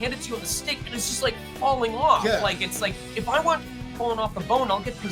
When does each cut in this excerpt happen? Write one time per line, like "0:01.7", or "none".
none